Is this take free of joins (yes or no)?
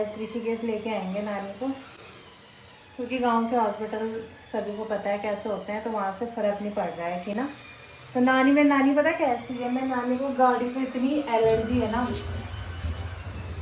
yes